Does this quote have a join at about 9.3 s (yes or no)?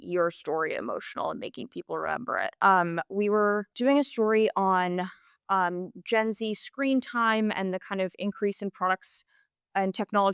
no